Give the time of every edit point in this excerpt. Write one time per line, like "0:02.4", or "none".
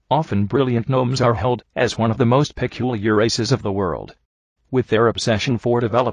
0:01.4